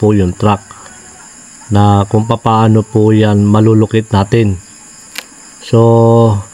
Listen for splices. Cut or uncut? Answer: uncut